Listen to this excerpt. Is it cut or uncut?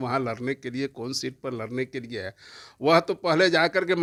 uncut